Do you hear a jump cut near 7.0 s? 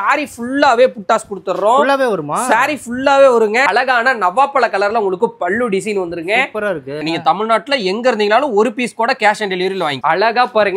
yes; 3 cuts; at 3.6 s, 7.0 s, 10.0 s

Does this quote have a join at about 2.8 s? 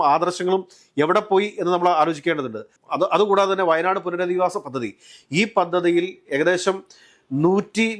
yes; 1 cut; at 2.8 s

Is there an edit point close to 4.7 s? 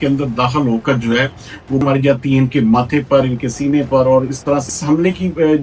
yes; 2 cuts; at 1.8 s, 4.7 s

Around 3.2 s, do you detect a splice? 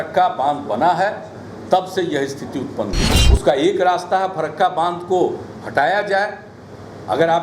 yes; 1 cut; at 3.2 s

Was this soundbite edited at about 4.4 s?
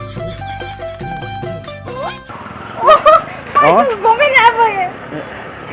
no; 1 cut; at 2.3 s

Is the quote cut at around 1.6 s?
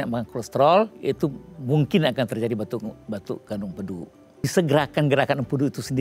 no; 1 cut; at 4.4 s

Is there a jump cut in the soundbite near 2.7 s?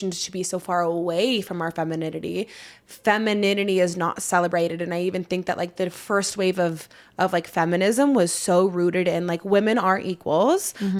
no; 0 cuts

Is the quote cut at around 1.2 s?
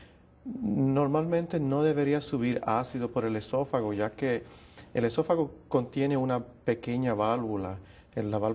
no; 0 cuts

